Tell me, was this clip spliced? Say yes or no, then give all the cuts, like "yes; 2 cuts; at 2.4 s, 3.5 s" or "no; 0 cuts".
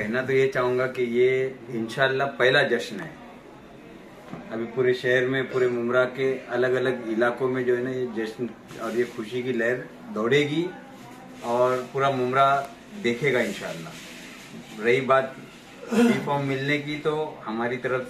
no; 0 cuts